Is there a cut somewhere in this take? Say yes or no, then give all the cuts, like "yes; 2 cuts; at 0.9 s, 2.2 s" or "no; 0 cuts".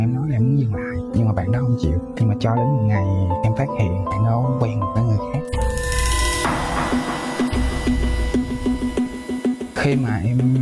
no; 0 cuts